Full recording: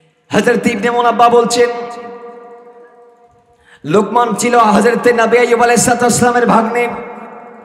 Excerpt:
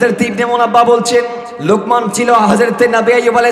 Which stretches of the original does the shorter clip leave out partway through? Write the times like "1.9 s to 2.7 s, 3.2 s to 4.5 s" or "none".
1.9 s to 3.7 s